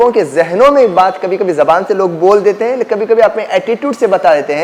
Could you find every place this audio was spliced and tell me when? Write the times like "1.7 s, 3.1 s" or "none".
none